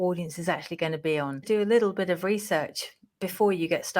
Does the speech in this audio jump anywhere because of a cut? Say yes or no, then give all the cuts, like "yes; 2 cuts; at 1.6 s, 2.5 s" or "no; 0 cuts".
yes; 1 cut; at 1.4 s